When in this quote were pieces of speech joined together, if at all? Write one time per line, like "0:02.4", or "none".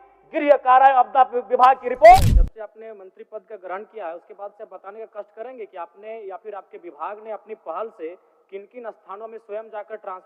0:02.2